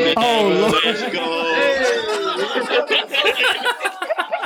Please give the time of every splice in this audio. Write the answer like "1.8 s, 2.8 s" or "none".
none